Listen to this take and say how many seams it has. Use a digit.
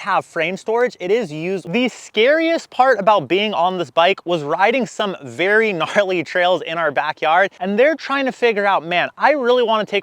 2